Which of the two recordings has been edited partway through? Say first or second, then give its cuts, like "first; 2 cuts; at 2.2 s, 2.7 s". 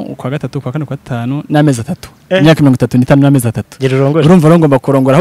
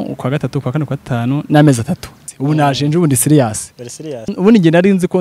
second; 2 cuts; at 2.2 s, 4.3 s